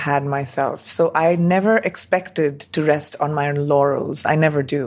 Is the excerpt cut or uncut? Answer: uncut